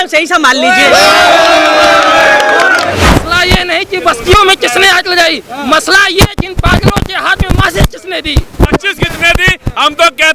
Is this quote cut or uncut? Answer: cut